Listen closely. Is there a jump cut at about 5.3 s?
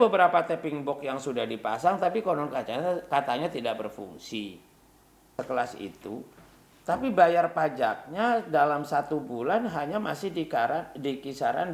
yes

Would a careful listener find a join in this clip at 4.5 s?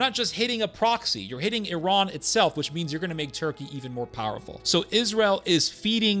yes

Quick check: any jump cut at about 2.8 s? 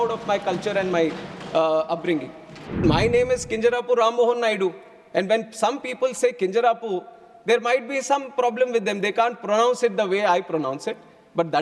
yes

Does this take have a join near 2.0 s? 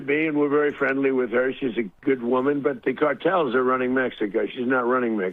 no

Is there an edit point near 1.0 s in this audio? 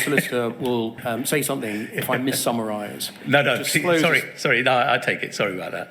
yes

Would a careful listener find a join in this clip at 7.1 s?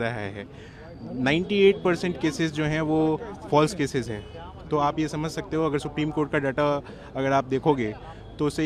no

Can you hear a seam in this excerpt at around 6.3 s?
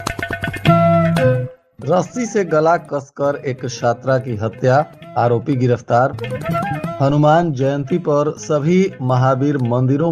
no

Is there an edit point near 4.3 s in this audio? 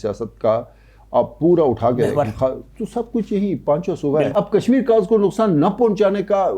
yes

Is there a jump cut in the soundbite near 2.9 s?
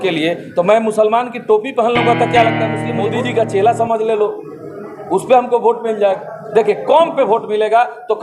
yes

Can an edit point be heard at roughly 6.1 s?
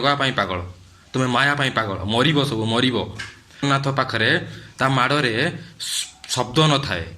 no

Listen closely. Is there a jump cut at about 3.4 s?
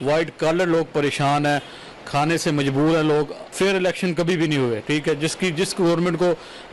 yes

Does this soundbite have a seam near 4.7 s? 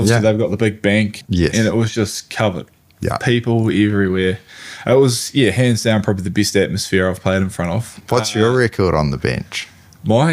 no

